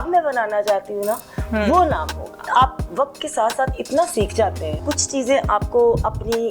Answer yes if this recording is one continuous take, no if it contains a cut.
no